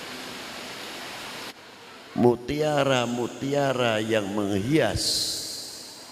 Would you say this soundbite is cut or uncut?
cut